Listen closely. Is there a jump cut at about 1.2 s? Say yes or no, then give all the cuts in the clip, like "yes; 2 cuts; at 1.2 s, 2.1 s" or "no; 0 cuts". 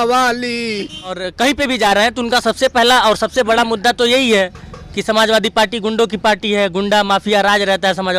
yes; 1 cut; at 1.2 s